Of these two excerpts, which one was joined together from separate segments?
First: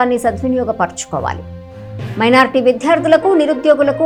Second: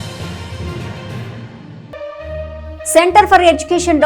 second; 1 cut; at 2.2 s

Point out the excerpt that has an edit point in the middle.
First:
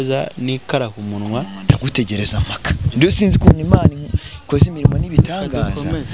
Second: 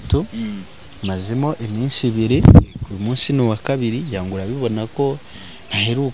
first; 1 cut; at 1.7 s

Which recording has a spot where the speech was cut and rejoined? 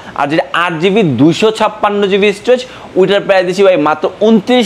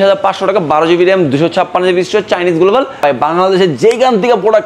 second; 1 cut; at 3.0 s

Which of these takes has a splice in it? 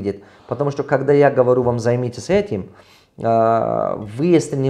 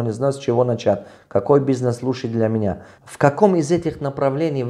second; 1 cut; at 2.9 s

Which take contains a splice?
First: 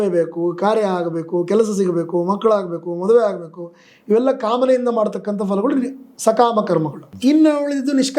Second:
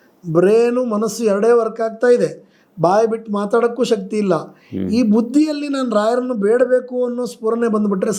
first; 1 cut; at 7.0 s

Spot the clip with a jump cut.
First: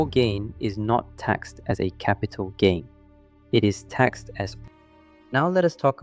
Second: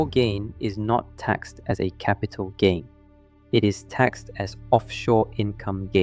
first; 1 cut; at 4.6 s

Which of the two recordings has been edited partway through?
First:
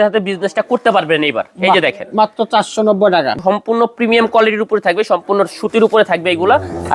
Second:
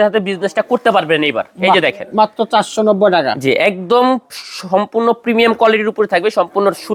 first; 1 cut; at 3.3 s

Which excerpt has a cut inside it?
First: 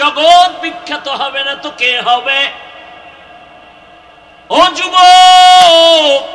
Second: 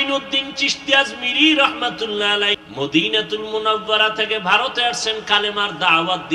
second; 1 cut; at 2.6 s

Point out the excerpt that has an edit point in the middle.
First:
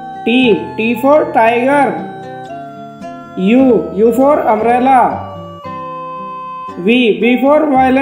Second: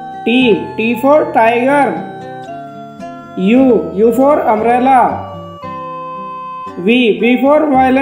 first; 2 cuts; at 2.0 s, 3.3 s

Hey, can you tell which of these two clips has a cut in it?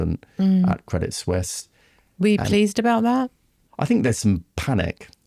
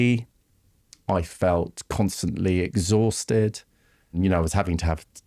second; 1 cut; at 4.2 s

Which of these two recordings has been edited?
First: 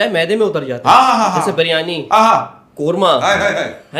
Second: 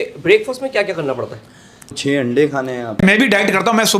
second; 2 cuts; at 1.9 s, 3.0 s

